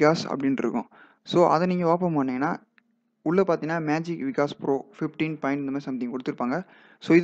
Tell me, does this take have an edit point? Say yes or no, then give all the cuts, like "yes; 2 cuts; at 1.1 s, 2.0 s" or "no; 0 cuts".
no; 0 cuts